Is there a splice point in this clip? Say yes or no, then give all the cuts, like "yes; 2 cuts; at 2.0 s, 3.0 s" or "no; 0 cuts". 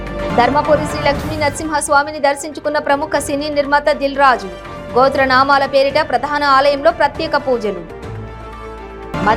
no; 0 cuts